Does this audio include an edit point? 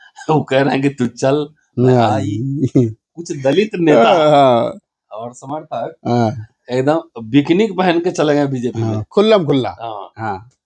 yes; 1 cut; at 3.0 s

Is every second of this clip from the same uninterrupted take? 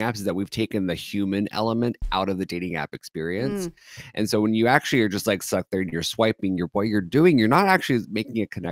yes; 0 cuts

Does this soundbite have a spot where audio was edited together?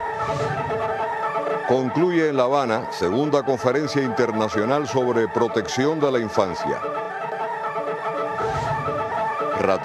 no; 0 cuts

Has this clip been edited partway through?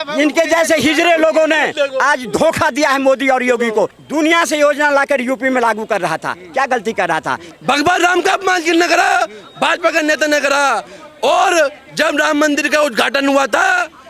yes; 2 cuts; at 4.0 s, 7.5 s

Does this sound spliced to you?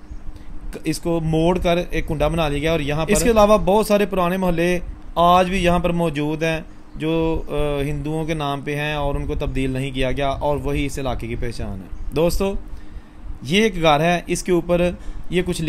yes; 1 cut; at 3.0 s

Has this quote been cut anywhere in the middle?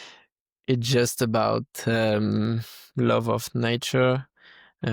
no; 0 cuts

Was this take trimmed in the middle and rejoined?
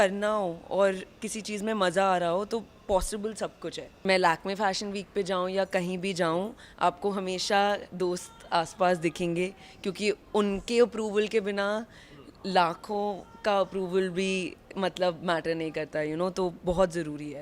yes; 1 cut; at 3.9 s

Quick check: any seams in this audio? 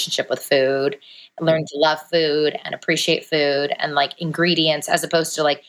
no; 0 cuts

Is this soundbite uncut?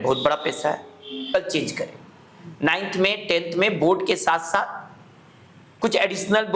no; 1 cut; at 1.3 s

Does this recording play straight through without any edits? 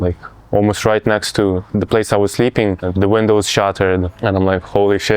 no; 2 cuts; at 2.8 s, 4.1 s

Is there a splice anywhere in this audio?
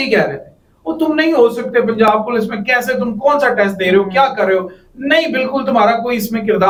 no; 0 cuts

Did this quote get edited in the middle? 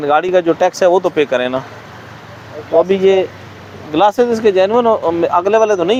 no; 0 cuts

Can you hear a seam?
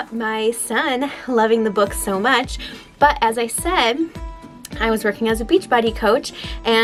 no; 0 cuts

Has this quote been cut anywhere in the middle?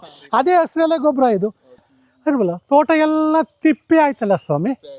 yes; 1 cut; at 1.8 s

